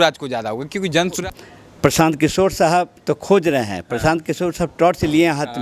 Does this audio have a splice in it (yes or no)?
yes